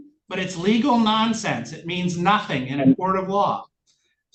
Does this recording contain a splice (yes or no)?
no